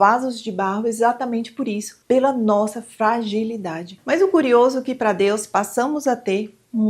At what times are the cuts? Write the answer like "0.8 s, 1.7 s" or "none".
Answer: 3.9 s